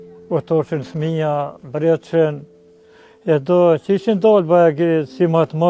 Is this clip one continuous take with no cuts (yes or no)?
yes